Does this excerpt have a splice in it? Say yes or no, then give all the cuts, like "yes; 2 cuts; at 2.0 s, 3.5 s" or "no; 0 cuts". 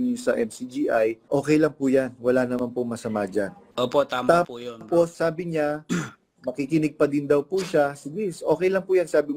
yes; 3 cuts; at 1.3 s, 3.6 s, 5.1 s